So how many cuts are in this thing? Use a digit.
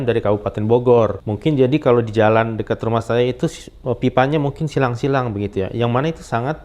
1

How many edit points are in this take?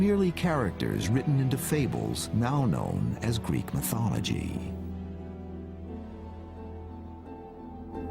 1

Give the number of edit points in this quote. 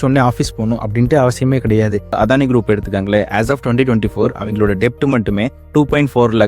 1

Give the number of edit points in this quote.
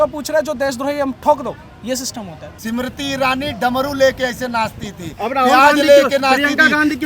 1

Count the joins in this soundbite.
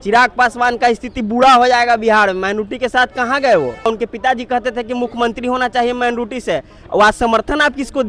1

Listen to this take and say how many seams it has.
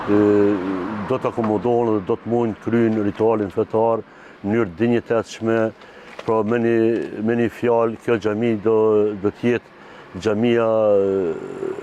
0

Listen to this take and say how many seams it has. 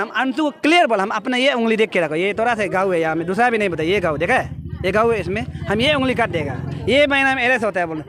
0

